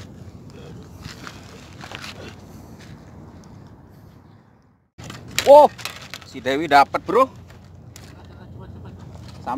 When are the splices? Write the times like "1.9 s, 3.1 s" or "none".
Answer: 4.8 s